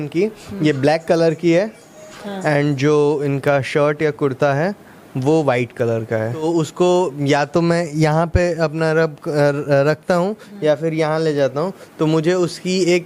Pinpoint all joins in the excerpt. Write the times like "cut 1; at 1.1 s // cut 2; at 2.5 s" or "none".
cut 1; at 6.4 s

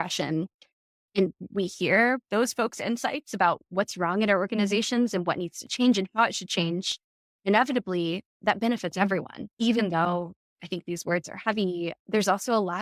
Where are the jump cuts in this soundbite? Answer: cut 1; at 9.4 s

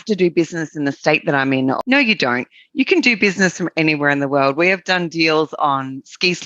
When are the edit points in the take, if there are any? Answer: cut 1; at 1.8 s

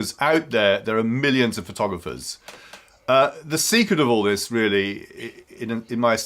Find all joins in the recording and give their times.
cut 1; at 4.4 s

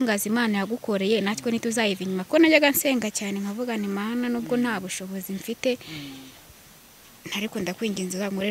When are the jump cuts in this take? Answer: cut 1; at 2.3 s

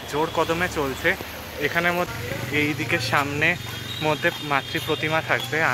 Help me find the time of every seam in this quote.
cut 1; at 2.1 s

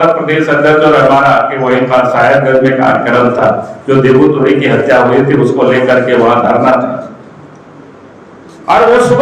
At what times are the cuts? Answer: none

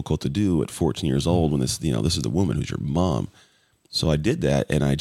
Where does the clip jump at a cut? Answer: none

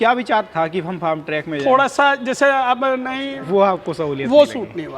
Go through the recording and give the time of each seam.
cut 1; at 3.0 s

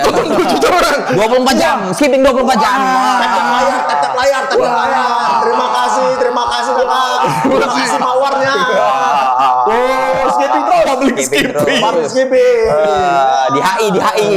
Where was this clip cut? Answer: none

